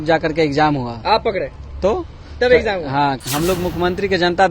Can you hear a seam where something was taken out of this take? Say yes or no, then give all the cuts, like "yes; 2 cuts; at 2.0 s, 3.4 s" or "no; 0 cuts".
yes; 1 cut; at 3.2 s